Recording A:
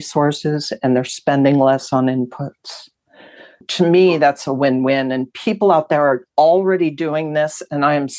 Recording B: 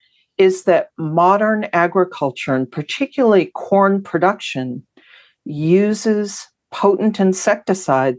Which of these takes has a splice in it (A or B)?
A